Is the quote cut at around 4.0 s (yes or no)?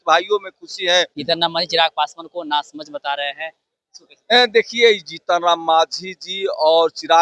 no